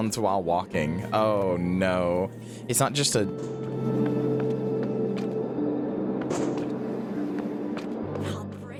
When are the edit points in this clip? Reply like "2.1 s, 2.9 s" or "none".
none